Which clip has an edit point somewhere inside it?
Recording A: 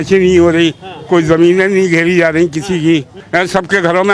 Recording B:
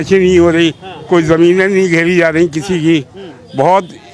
A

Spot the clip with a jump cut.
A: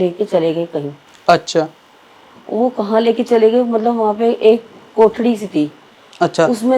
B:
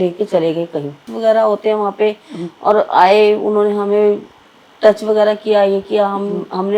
B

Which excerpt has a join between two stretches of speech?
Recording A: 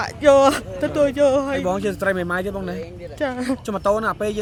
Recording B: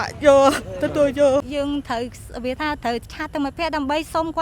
B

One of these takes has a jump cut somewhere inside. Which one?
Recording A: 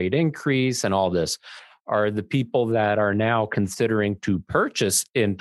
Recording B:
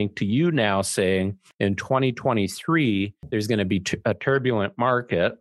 B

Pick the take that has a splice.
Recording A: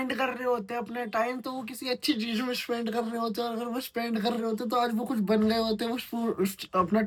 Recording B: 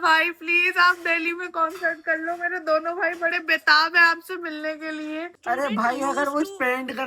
B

